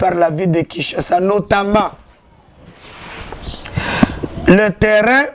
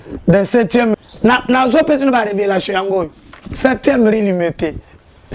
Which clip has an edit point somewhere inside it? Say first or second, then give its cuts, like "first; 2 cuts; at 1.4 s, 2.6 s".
second; 1 cut; at 0.9 s